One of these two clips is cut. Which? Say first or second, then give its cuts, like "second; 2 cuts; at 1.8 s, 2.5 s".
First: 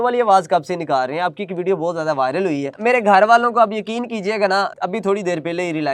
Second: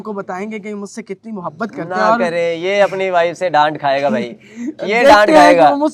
first; 1 cut; at 2.7 s